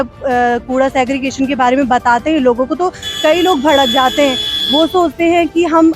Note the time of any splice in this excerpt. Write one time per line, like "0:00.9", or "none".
none